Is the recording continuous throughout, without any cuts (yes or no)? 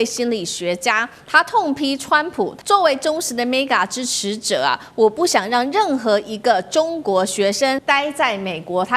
no